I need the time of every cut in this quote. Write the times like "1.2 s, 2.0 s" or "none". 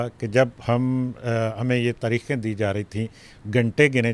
none